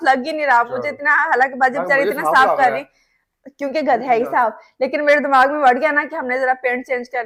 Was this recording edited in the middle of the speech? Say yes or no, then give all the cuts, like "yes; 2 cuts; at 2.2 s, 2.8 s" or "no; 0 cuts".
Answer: no; 0 cuts